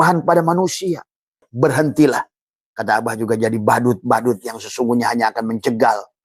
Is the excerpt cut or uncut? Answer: cut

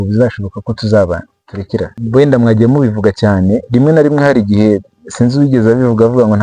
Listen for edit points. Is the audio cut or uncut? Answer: cut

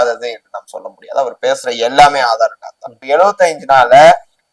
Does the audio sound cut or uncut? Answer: cut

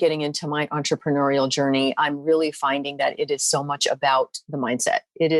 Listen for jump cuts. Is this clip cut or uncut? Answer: cut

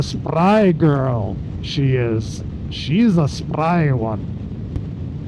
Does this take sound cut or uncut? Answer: uncut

